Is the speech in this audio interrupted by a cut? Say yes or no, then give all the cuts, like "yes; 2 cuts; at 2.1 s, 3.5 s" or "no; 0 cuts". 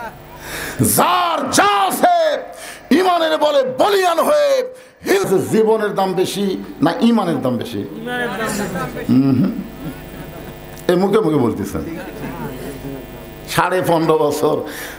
yes; 1 cut; at 5.3 s